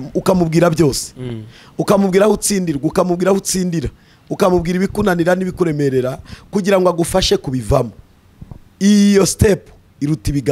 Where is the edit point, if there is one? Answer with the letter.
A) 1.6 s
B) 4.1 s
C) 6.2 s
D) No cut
D